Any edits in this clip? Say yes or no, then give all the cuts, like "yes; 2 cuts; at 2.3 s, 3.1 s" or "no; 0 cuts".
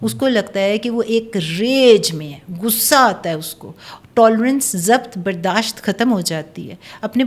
no; 0 cuts